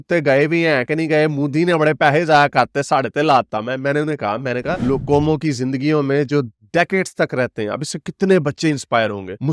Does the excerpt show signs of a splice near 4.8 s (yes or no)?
yes